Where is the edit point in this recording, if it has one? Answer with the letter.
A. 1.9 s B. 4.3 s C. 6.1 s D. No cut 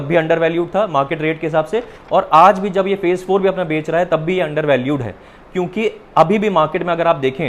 D